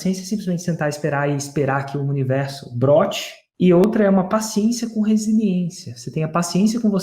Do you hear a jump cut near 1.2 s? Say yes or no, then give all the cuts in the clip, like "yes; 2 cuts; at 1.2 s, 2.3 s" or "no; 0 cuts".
no; 1 cut; at 3.8 s